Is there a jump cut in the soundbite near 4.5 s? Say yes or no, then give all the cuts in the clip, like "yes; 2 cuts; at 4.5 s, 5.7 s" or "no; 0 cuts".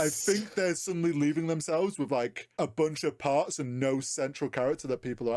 no; 1 cut; at 2.4 s